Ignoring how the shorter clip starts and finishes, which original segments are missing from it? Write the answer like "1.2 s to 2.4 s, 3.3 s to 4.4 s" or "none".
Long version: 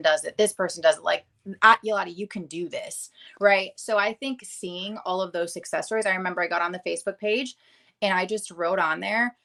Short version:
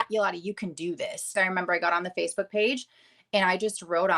3.1 s to 6.0 s